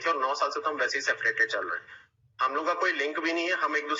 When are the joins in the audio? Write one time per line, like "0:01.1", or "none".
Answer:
none

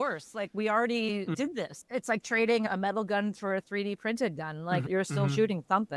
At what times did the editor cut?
0:01.7
0:02.6
0:04.9

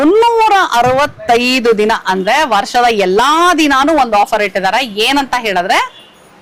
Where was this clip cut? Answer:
none

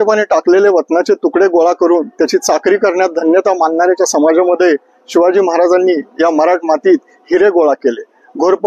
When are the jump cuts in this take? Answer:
none

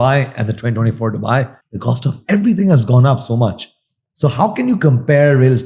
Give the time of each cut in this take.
0:01.6

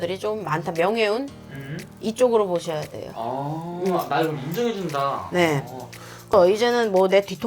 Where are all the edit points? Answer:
0:06.3

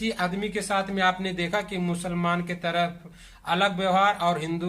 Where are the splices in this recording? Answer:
none

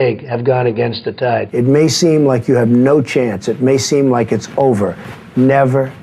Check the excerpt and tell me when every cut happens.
0:01.5

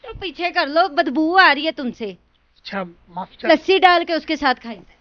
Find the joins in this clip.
0:03.5

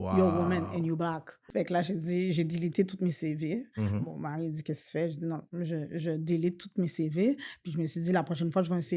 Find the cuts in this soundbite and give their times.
0:01.4

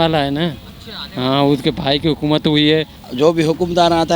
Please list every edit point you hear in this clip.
0:03.0

